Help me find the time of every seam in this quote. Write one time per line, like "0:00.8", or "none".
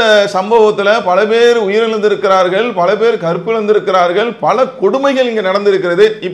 none